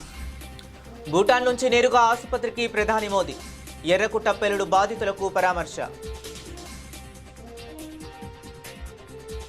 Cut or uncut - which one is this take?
uncut